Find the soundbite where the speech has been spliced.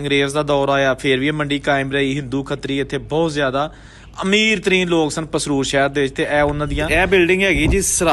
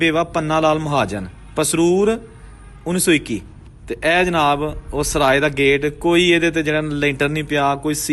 first; 1 cut; at 6.8 s

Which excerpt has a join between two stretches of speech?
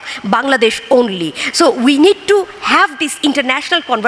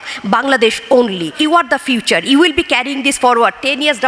second; 1 cut; at 1.3 s

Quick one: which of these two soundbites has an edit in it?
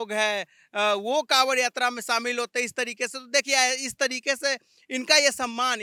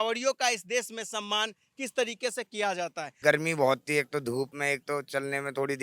second; 2 cuts; at 3.2 s, 4.6 s

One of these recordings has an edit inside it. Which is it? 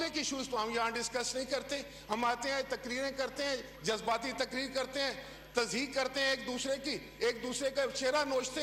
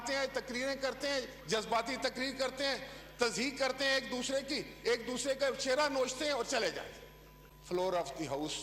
second; 1 cut; at 7.5 s

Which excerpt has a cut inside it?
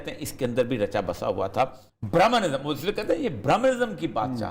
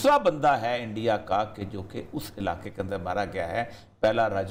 first; 1 cut; at 1.8 s

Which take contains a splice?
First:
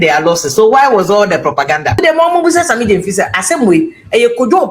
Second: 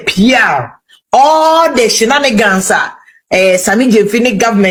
first; 1 cut; at 2.0 s

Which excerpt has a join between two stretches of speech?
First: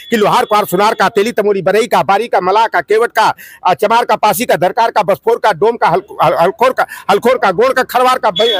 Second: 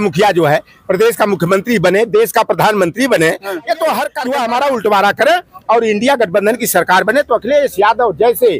second; 1 cut; at 4.2 s

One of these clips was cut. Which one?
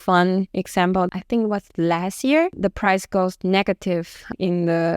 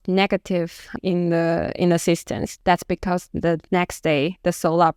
first; 1 cut; at 0.9 s

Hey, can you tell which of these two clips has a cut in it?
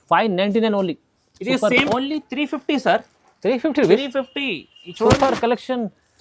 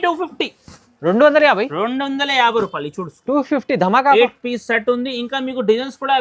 first; 1 cut; at 1.8 s

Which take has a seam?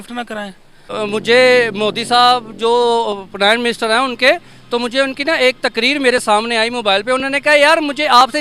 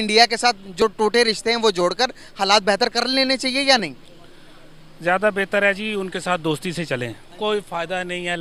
first; 1 cut; at 0.9 s

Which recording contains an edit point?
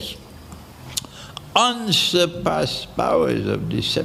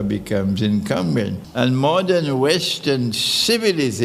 second; 1 cut; at 1.4 s

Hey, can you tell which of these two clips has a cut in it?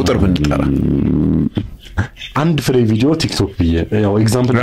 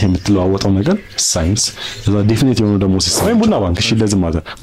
second; 1 cut; at 3.1 s

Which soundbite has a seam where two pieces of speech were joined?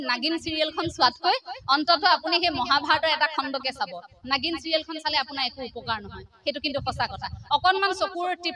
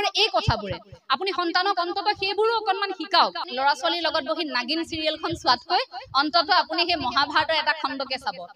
second; 1 cut; at 3.5 s

